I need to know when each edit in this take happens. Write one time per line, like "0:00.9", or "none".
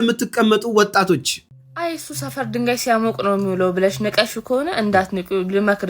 0:01.4

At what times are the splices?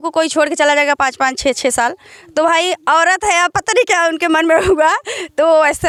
none

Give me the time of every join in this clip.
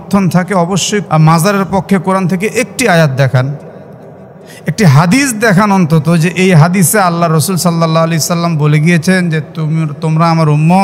0:01.0

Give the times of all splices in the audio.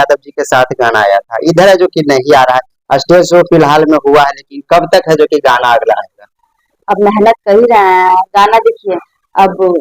none

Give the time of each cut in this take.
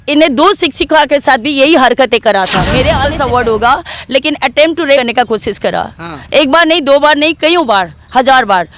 0:03.0
0:05.0

